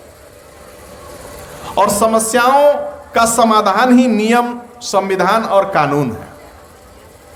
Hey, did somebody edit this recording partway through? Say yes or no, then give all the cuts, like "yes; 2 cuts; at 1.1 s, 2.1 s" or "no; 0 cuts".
no; 0 cuts